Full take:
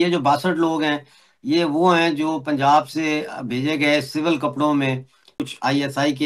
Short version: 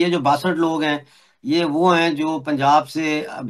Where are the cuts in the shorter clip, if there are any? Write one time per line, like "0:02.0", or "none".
none